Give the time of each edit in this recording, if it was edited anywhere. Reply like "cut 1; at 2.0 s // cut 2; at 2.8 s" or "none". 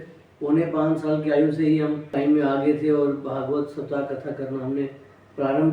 cut 1; at 2.1 s